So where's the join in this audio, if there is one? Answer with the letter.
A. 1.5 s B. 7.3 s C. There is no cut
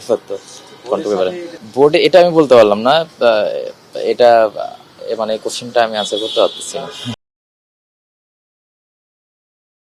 C